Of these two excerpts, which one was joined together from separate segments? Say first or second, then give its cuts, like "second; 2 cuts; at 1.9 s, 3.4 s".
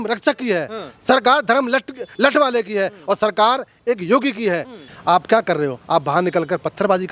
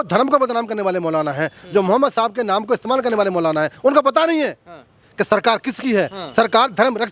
first; 1 cut; at 4.9 s